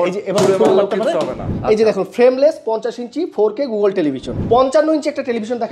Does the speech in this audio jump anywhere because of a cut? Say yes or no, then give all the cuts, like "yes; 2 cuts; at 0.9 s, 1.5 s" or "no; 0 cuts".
yes; 2 cuts; at 1.5 s, 4.3 s